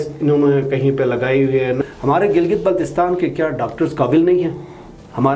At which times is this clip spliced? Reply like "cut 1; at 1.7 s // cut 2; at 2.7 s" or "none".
cut 1; at 1.8 s